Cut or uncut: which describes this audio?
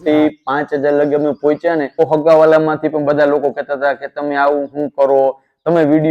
cut